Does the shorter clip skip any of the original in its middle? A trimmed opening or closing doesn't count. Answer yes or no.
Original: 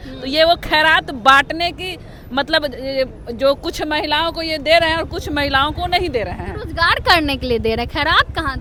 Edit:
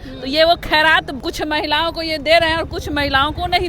yes